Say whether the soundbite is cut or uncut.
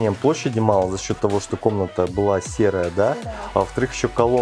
uncut